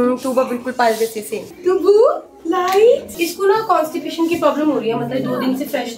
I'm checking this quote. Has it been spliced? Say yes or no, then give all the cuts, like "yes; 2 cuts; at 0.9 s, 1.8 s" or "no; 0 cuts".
yes; 1 cut; at 1.3 s